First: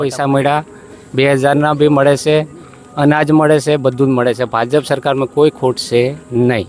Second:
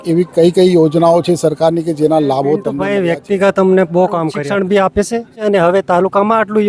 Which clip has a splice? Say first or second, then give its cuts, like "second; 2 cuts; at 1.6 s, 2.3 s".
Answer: second; 3 cuts; at 2.8 s, 4.4 s, 5.5 s